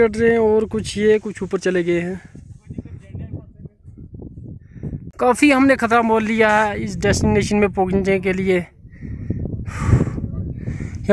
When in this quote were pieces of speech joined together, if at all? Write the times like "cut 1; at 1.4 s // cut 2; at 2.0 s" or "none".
cut 1; at 5.1 s